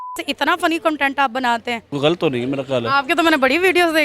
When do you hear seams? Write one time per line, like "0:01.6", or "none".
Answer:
0:01.9